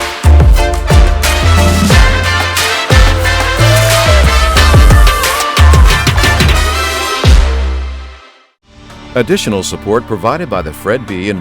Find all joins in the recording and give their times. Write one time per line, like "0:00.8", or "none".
0:08.8

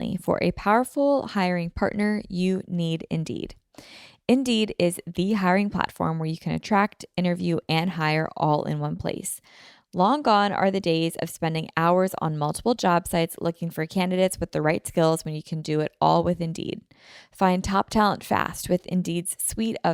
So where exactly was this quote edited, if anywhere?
none

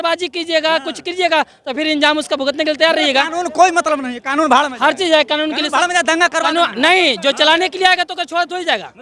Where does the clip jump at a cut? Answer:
none

